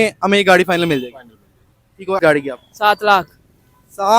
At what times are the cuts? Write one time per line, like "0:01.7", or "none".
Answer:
0:02.2